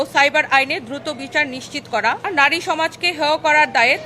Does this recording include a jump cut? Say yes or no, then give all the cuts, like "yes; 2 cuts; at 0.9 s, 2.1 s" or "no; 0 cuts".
yes; 1 cut; at 2.3 s